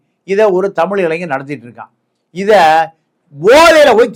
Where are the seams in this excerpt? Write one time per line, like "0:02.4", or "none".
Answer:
none